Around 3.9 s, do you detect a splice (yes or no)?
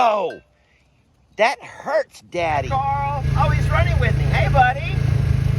no